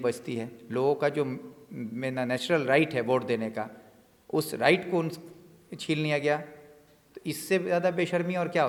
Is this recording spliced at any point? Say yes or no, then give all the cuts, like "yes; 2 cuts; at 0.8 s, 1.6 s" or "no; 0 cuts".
no; 0 cuts